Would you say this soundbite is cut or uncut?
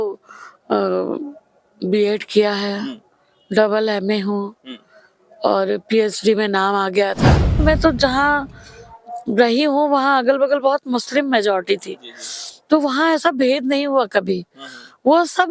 cut